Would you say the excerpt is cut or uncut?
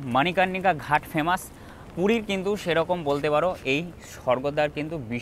uncut